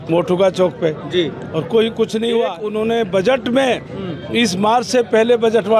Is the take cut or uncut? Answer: cut